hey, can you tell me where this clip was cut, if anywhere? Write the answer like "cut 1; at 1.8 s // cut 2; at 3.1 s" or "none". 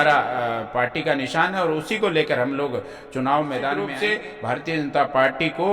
cut 1; at 4.0 s